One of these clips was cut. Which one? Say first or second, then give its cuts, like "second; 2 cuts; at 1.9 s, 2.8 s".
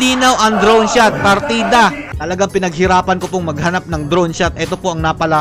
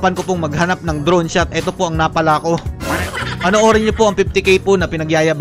first; 1 cut; at 2.0 s